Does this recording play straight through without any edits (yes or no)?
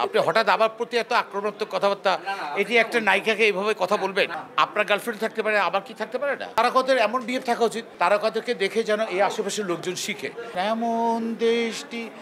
no